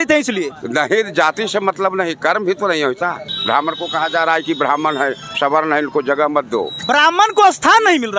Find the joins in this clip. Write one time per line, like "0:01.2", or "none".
0:03.3